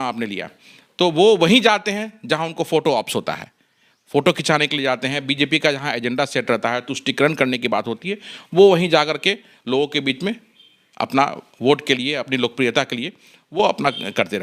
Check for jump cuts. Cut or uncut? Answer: uncut